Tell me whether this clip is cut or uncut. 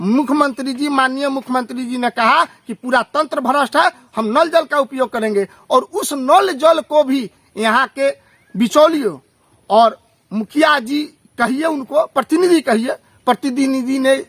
uncut